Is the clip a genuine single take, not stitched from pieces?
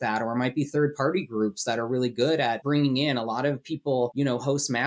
no; 2 cuts; at 2.6 s, 4.1 s

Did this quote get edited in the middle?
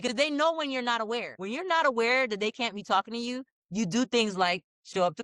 yes; 1 cut; at 1.4 s

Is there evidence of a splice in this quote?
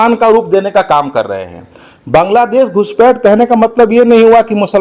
no; 0 cuts

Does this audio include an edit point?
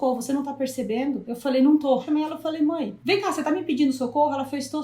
yes; 3 cuts; at 1.3 s, 2.0 s, 3.0 s

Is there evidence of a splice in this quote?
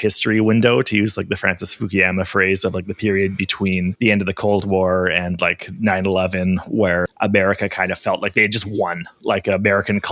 yes; 2 cuts; at 3.9 s, 7.0 s

